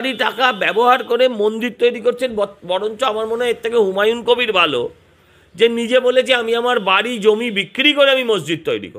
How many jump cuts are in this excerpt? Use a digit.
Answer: 0